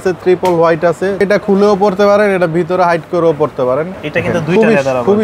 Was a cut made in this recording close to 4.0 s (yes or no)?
yes